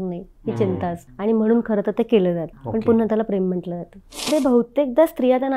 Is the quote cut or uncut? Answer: cut